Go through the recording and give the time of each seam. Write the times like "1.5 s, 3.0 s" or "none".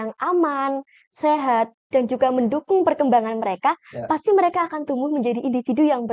none